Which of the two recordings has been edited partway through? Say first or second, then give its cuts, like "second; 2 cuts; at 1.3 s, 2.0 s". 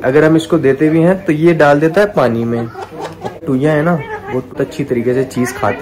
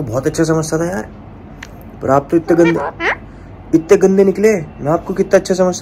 first; 2 cuts; at 3.4 s, 4.6 s